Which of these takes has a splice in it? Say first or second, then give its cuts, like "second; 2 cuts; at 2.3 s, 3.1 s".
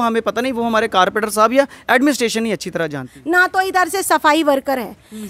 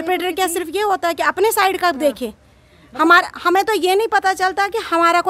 first; 1 cut; at 3.1 s